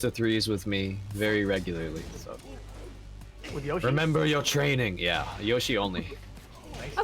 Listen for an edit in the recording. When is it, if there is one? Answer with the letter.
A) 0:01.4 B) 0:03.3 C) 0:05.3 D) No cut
C